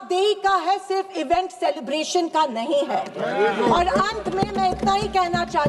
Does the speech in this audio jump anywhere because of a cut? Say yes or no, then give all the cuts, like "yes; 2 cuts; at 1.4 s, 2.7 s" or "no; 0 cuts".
no; 0 cuts